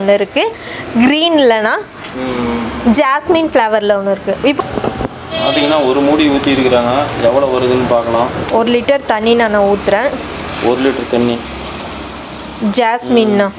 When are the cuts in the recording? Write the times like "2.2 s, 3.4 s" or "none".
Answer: 4.6 s